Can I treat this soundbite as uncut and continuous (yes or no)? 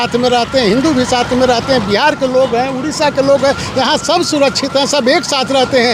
yes